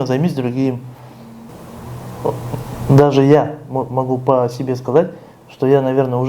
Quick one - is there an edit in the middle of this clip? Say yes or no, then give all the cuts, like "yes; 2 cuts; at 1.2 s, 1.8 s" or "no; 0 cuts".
yes; 1 cut; at 1.5 s